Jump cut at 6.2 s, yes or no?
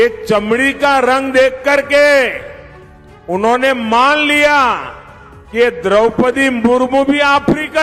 no